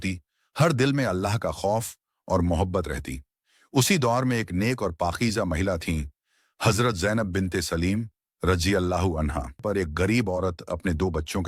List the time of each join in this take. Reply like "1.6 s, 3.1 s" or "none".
9.6 s